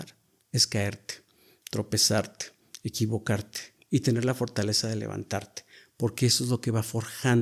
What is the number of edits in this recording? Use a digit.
0